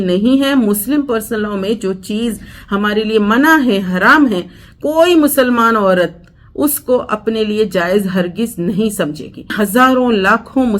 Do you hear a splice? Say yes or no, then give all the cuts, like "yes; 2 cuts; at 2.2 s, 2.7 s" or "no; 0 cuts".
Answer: yes; 1 cut; at 9.5 s